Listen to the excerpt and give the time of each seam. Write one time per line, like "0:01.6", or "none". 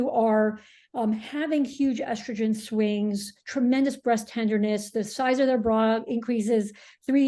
none